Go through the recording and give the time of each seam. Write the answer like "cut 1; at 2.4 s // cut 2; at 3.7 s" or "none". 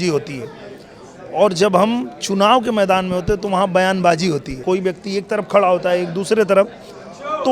cut 1; at 4.6 s